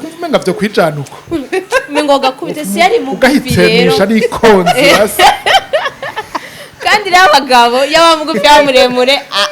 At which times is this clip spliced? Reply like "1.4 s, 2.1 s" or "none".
none